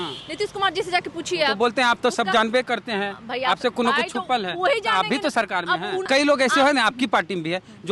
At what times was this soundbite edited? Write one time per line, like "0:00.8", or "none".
0:06.0